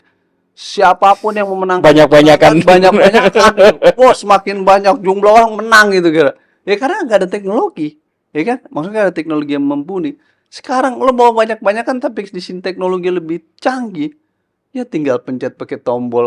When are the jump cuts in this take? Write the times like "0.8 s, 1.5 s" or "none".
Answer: none